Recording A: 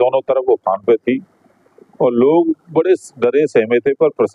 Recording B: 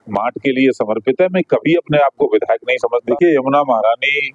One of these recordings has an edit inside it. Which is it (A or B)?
B